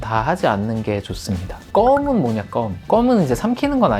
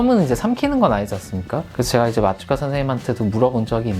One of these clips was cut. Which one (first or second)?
first